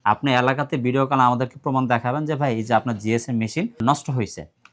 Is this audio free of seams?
no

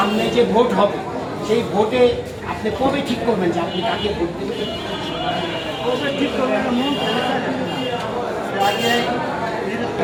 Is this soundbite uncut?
yes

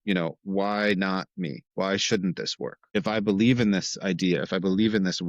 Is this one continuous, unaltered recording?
no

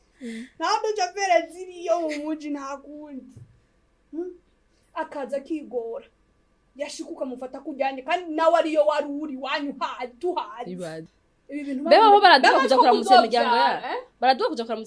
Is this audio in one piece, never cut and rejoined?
no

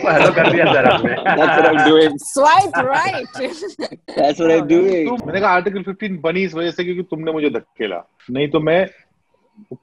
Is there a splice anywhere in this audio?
yes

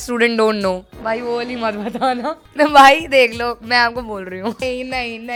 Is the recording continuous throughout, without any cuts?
yes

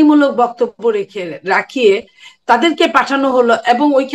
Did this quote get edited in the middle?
no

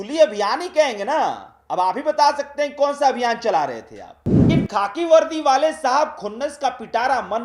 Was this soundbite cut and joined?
yes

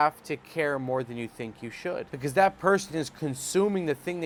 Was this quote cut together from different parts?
no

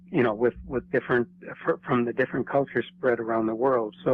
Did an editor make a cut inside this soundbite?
no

